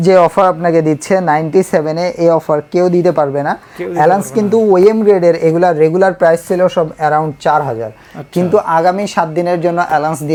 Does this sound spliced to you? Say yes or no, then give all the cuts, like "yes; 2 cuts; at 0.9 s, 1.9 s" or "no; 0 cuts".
no; 0 cuts